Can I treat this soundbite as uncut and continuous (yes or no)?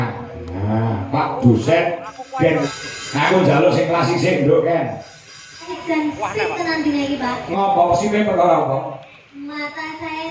no